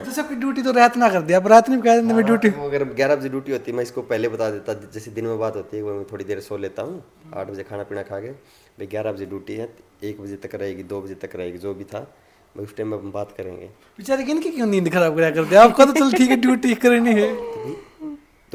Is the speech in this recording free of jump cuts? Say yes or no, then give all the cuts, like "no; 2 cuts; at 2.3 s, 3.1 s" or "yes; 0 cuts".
yes; 0 cuts